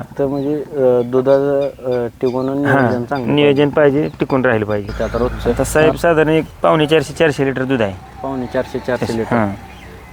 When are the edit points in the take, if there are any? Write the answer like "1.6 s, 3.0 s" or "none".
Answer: 5.4 s